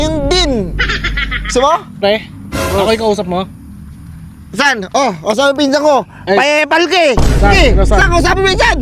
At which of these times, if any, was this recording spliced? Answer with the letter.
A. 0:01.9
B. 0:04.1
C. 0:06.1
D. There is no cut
A